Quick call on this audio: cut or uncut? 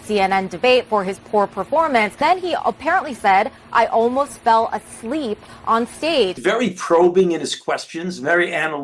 cut